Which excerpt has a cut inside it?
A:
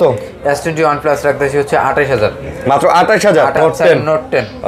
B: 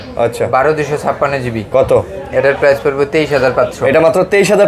A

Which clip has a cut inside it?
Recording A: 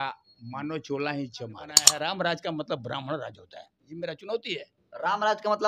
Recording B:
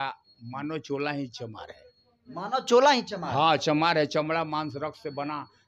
A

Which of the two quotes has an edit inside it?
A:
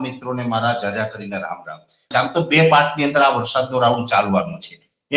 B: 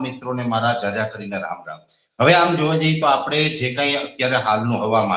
A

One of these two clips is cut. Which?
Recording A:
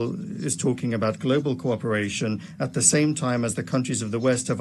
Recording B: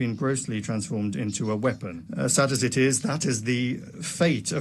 B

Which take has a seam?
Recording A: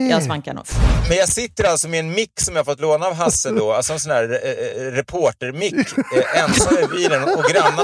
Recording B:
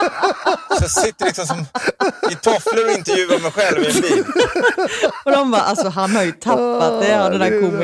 A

